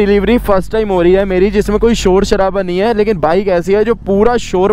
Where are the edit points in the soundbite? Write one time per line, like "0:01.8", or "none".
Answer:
none